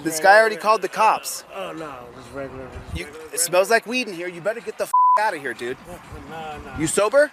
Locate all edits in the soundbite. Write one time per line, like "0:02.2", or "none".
none